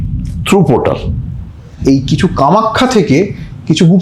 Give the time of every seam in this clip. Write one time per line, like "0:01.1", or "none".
0:01.7